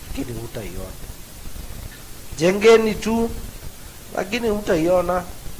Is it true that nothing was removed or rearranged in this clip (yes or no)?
no